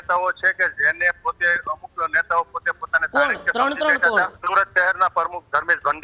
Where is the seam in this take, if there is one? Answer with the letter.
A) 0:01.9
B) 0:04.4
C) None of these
B